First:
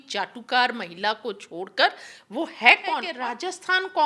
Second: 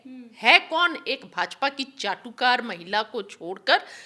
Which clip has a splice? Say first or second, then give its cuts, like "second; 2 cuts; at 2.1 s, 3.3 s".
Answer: first; 1 cut; at 3.1 s